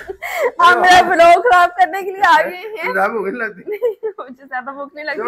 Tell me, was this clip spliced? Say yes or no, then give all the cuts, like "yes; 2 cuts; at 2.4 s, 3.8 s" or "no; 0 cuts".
no; 0 cuts